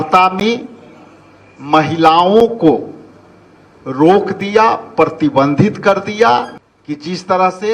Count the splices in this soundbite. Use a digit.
1